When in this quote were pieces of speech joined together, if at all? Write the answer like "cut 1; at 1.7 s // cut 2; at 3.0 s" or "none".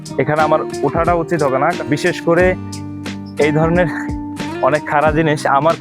cut 1; at 1.8 s